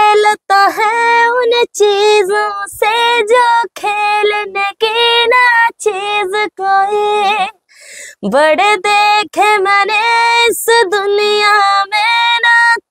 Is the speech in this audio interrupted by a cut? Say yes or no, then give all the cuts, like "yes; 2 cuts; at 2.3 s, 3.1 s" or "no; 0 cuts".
no; 0 cuts